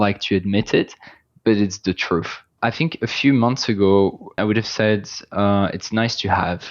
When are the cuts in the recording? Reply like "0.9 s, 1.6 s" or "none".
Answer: 2.5 s, 4.4 s